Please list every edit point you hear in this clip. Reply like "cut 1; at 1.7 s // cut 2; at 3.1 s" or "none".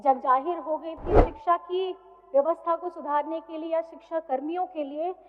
cut 1; at 1.2 s